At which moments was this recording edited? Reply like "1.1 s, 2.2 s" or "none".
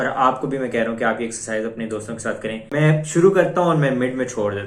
2.7 s

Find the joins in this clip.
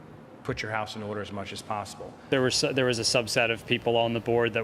2.2 s

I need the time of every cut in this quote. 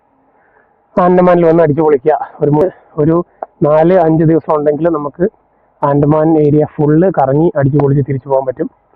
2.6 s

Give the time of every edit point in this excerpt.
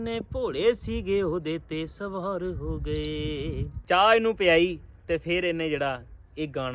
3.7 s

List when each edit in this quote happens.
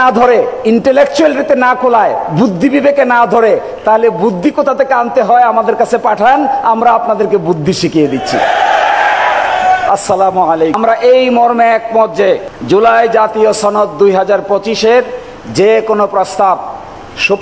10.8 s

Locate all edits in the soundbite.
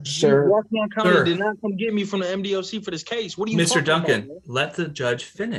none

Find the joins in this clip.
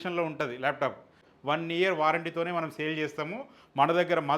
1.2 s

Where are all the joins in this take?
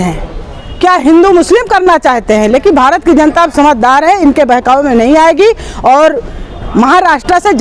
none

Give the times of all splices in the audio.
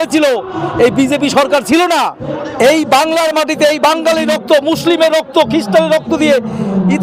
2.3 s

